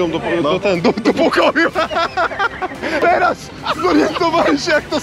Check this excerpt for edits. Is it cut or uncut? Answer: cut